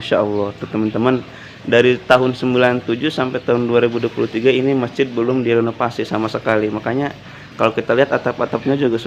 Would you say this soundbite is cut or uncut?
uncut